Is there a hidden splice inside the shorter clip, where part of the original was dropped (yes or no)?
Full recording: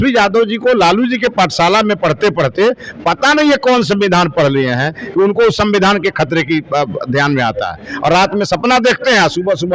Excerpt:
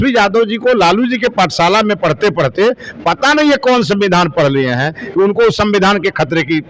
no